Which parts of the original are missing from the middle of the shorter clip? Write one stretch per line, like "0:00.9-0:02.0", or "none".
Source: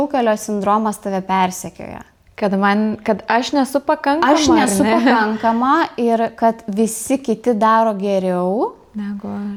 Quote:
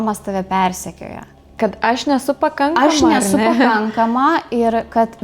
0:02.3-0:03.0